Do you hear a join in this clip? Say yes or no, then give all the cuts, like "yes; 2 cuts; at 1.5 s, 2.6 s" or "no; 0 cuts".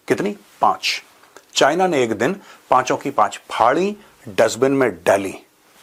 no; 0 cuts